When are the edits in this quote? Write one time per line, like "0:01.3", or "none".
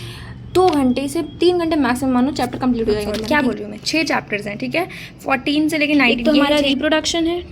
0:03.1
0:06.2